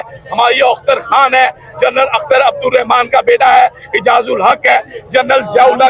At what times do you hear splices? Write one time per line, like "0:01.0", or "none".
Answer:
none